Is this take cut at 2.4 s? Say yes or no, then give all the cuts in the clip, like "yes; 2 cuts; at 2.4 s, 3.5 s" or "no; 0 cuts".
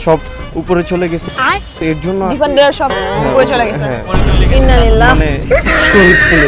no; 0 cuts